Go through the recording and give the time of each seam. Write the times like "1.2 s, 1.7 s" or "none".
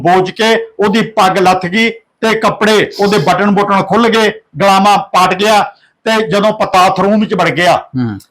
6.7 s